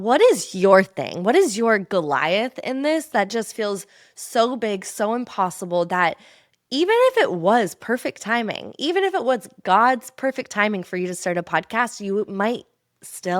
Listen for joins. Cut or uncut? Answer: uncut